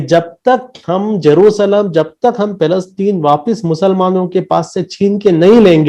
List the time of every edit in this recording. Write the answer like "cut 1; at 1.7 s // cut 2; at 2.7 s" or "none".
none